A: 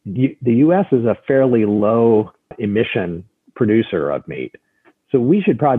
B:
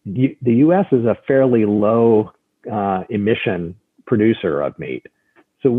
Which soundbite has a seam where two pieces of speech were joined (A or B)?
A